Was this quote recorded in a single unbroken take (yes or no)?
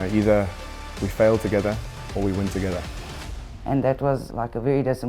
no